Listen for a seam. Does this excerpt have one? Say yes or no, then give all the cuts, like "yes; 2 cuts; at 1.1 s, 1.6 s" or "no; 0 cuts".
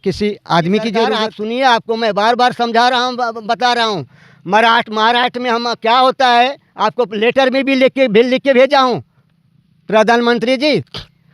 yes; 1 cut; at 1.1 s